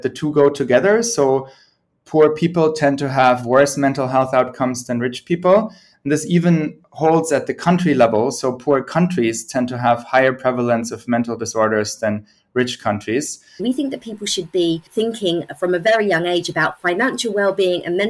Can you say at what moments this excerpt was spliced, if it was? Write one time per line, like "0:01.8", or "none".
0:13.6
0:14.9